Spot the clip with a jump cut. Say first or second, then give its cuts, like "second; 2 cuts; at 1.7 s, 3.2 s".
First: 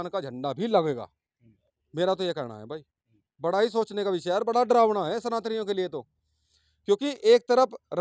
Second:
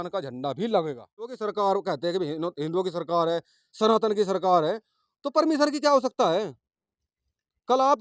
second; 1 cut; at 1.4 s